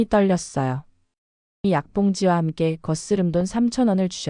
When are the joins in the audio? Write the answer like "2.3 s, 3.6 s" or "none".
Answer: 1.6 s